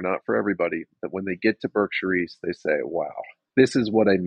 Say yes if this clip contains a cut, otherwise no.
yes